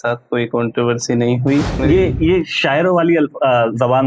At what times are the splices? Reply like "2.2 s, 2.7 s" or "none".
1.8 s